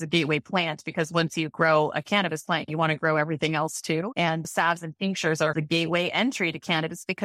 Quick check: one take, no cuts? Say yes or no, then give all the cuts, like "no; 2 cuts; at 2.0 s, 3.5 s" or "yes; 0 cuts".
no; 2 cuts; at 4.5 s, 5.5 s